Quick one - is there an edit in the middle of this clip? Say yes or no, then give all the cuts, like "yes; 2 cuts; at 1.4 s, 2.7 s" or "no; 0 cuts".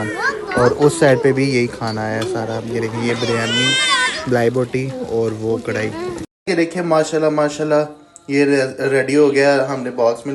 yes; 1 cut; at 6.3 s